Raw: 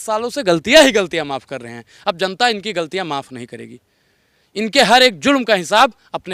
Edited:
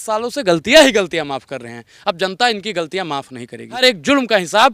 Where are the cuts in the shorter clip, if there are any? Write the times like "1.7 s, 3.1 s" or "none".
3.8 s